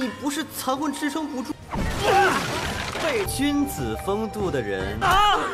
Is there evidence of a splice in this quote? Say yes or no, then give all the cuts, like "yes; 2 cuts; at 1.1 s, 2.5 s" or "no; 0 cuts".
yes; 1 cut; at 1.5 s